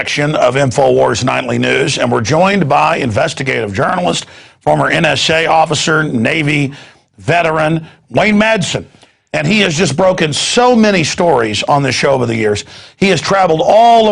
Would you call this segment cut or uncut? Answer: cut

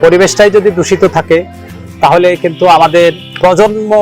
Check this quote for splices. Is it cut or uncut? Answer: uncut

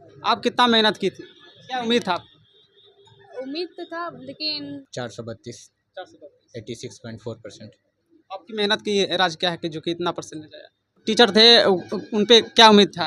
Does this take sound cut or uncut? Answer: cut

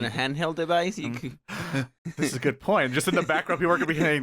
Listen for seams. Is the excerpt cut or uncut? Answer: cut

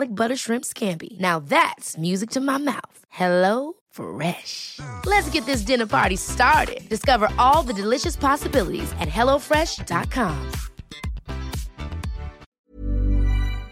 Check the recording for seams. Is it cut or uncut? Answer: cut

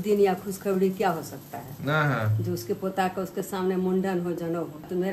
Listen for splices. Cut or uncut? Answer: uncut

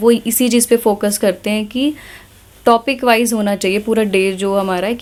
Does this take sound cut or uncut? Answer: uncut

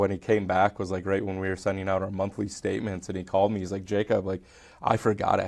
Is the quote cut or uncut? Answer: uncut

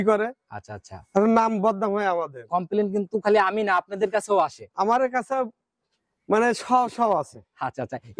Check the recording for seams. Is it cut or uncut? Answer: uncut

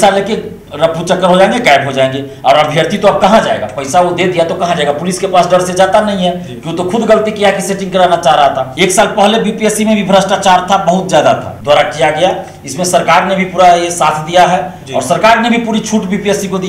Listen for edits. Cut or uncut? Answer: cut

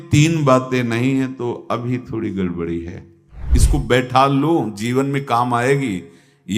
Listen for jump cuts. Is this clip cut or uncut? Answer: cut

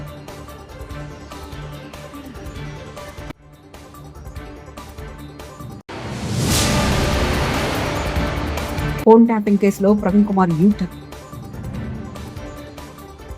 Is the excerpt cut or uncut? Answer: cut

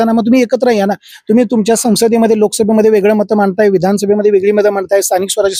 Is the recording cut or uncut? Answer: uncut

